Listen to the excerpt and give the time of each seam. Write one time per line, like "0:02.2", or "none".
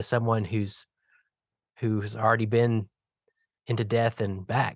none